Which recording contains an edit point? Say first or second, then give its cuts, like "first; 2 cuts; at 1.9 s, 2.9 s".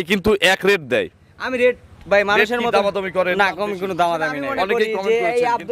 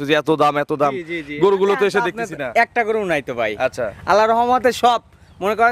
first; 1 cut; at 4.7 s